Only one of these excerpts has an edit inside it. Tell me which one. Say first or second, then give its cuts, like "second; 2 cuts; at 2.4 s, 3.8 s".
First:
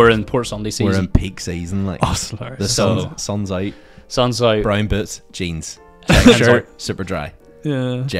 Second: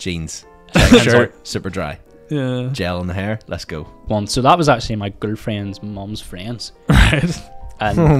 second; 1 cut; at 4.0 s